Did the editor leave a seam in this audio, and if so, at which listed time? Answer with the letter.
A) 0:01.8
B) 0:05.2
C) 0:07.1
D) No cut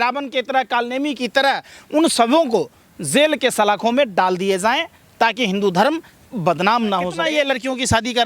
C